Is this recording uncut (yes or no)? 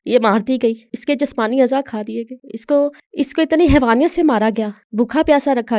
no